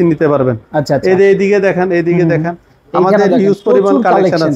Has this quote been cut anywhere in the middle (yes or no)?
no